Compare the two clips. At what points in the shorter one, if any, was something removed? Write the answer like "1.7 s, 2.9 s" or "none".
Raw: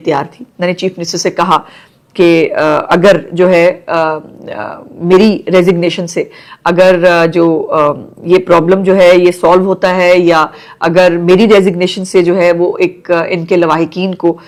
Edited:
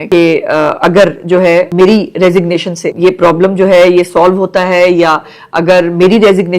1.7 s, 2.8 s